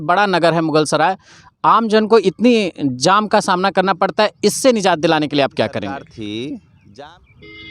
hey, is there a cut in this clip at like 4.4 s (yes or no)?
no